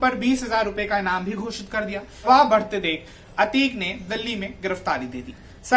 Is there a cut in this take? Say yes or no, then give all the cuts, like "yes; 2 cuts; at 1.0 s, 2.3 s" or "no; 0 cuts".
yes; 1 cut; at 2.3 s